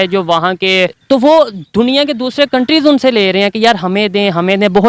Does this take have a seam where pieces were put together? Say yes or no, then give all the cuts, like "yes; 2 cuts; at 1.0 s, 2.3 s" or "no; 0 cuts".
yes; 1 cut; at 1.0 s